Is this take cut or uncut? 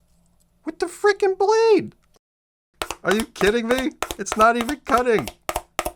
cut